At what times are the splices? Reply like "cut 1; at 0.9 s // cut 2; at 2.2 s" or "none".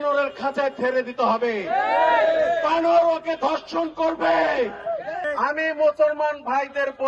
cut 1; at 5.2 s